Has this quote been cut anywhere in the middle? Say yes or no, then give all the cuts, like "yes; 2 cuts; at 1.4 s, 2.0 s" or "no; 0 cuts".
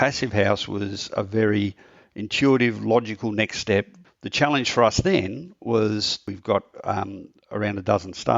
yes; 2 cuts; at 4.0 s, 6.3 s